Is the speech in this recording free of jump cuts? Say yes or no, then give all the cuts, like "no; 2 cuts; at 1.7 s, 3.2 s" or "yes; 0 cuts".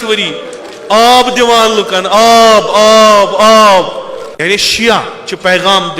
no; 1 cut; at 4.3 s